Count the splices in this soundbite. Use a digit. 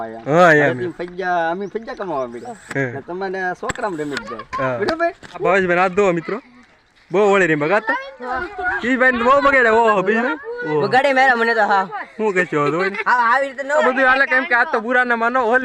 3